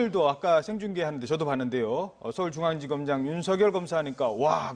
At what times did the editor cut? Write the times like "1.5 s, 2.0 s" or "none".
1.2 s